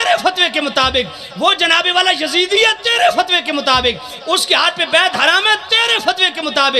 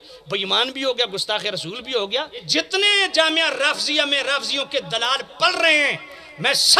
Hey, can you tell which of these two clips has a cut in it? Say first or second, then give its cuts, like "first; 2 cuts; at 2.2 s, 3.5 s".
second; 1 cut; at 2.5 s